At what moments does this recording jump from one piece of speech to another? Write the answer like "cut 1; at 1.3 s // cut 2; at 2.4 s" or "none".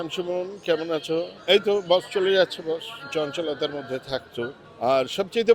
cut 1; at 1.3 s // cut 2; at 3.0 s // cut 3; at 4.6 s